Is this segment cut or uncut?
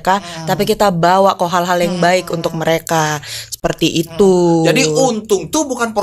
uncut